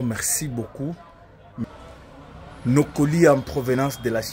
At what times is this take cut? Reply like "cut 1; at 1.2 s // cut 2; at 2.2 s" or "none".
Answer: cut 1; at 1.6 s